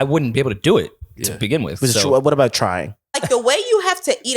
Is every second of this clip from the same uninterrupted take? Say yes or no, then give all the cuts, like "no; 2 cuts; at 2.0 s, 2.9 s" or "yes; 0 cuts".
no; 1 cut; at 3.2 s